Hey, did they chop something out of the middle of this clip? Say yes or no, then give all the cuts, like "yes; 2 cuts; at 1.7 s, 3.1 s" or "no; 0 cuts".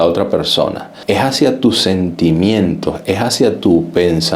no; 0 cuts